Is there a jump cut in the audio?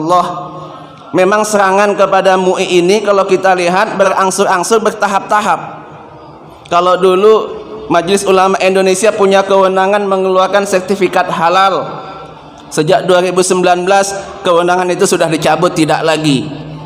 yes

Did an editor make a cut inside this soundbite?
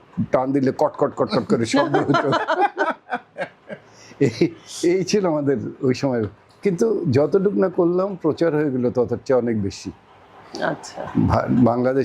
no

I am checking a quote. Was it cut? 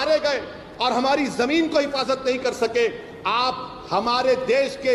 no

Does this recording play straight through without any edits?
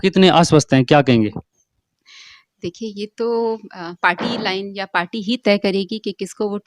yes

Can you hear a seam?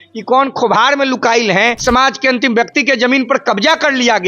yes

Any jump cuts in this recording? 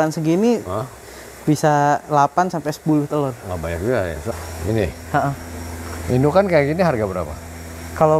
yes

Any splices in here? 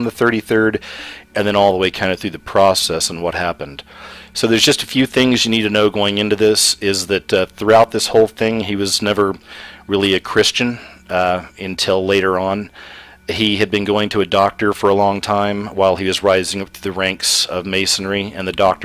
no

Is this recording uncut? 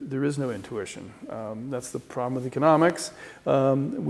yes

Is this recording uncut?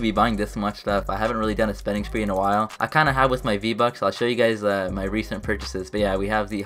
yes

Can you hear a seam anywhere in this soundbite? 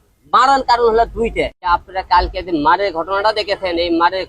yes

